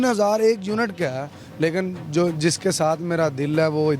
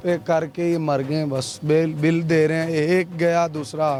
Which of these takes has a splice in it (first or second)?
first